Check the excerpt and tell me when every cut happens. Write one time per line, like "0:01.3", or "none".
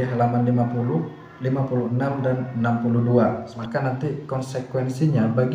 0:03.6